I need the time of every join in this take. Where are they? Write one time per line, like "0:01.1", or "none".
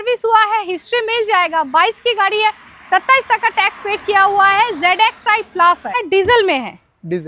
0:06.0